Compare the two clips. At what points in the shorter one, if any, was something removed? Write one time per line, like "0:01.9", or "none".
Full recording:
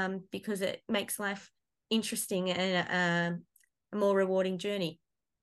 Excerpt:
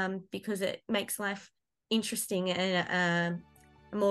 none